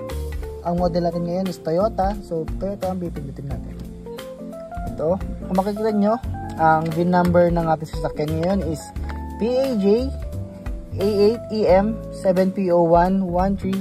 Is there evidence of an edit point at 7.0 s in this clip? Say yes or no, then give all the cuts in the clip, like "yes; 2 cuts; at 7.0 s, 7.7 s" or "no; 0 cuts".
no; 2 cuts; at 3.5 s, 5.0 s